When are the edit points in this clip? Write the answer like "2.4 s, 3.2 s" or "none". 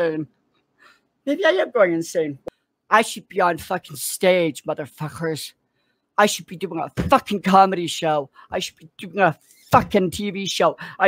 2.4 s